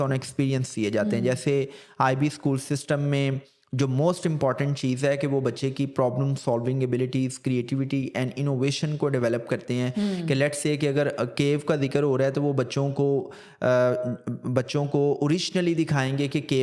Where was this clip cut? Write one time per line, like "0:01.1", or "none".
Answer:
none